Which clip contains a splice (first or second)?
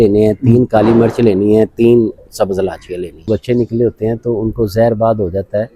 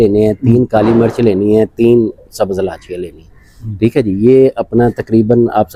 first